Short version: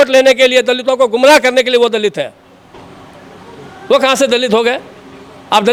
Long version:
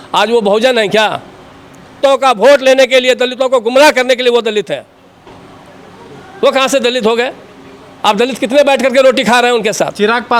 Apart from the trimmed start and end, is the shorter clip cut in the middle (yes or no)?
no